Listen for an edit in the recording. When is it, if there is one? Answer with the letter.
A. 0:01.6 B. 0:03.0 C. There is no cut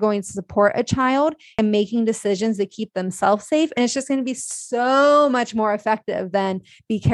A